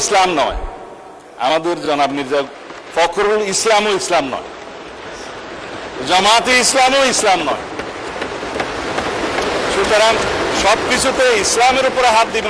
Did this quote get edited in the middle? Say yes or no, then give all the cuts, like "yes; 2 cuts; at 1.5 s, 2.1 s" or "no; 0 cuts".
no; 0 cuts